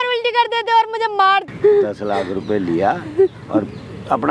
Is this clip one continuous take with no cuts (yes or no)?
no